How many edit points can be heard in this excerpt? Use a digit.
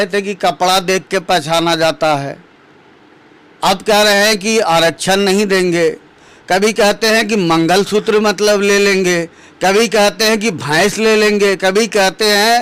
0